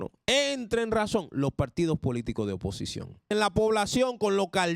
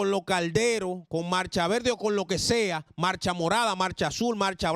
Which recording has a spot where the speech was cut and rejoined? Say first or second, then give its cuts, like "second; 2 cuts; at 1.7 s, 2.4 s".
first; 1 cut; at 3.3 s